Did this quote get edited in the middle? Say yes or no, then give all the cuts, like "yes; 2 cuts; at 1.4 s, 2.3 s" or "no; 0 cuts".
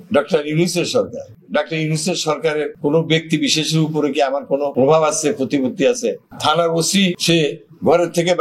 yes; 2 cuts; at 2.7 s, 4.7 s